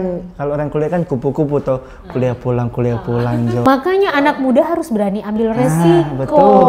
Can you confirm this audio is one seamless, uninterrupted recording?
no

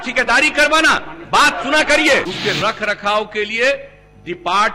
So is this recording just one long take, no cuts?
no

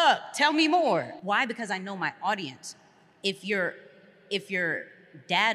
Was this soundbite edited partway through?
yes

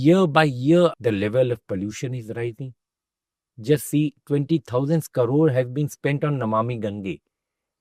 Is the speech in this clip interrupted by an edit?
yes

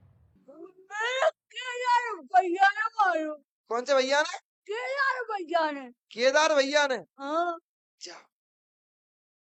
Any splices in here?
no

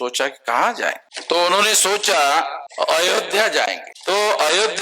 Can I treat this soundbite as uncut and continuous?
no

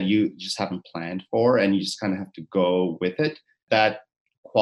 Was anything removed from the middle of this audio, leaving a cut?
yes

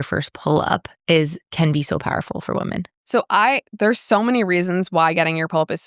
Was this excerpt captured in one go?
yes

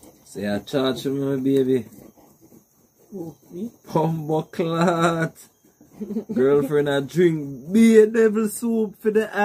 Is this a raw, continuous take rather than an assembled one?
yes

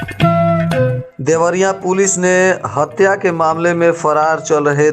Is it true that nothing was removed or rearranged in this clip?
no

